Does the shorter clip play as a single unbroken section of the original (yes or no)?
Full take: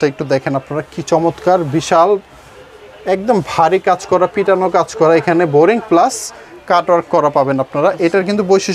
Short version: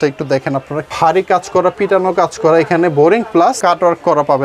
no